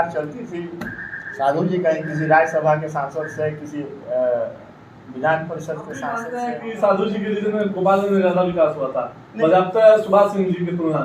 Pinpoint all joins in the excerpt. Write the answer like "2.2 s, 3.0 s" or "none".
6.3 s